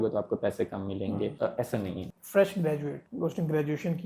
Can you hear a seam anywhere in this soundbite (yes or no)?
yes